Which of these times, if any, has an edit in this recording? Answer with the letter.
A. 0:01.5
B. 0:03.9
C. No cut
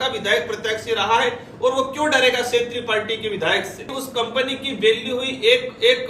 B